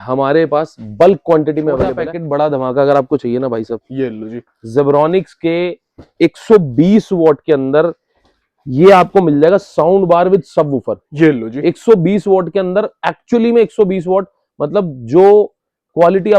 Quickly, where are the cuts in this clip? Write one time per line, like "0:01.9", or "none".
0:02.1